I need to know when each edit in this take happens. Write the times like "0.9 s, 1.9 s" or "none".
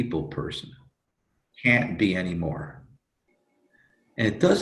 1.4 s